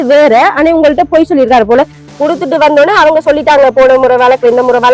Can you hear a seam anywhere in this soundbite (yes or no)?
yes